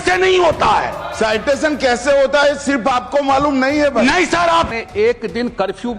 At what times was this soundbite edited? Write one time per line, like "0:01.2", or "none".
0:04.7